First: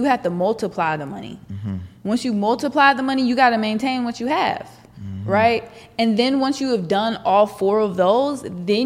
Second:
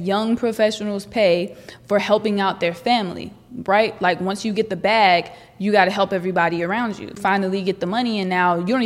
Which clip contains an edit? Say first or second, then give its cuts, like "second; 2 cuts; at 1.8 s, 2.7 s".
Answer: second; 1 cut; at 7.2 s